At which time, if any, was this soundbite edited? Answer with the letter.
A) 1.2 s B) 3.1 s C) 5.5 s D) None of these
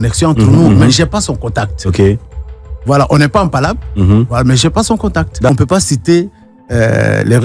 C